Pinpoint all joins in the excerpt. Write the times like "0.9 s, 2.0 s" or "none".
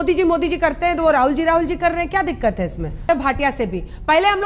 2.9 s